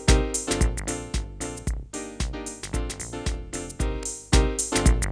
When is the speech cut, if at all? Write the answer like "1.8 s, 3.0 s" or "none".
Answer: 4.1 s